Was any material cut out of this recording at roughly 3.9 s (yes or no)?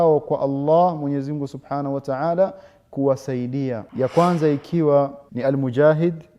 yes